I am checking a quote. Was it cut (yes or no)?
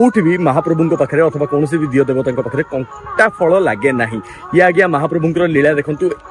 no